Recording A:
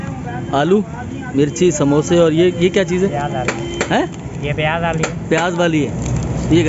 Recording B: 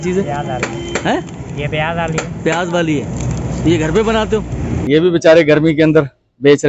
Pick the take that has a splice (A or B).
B